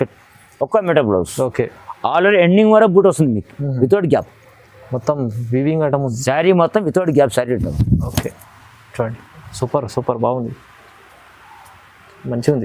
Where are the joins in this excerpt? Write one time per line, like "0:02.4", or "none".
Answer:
none